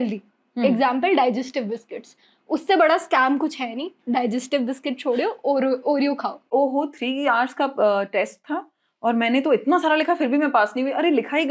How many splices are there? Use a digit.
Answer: 1